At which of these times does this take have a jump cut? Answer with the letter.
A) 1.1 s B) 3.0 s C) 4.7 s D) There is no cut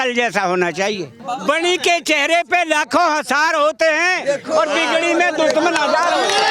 A